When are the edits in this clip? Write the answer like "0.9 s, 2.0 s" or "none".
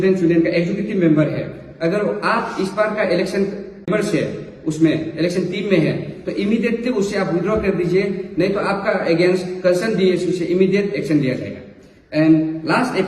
3.9 s